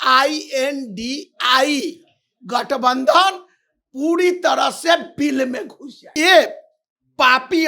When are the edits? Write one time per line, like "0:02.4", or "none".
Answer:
0:06.1